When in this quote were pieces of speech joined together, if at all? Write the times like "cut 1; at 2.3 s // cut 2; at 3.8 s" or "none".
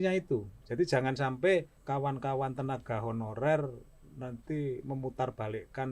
cut 1; at 1.8 s